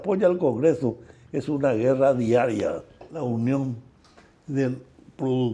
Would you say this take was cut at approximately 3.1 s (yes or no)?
yes